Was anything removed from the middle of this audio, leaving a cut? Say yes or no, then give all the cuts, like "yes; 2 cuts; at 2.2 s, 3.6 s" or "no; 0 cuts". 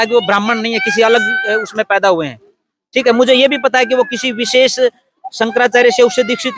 no; 0 cuts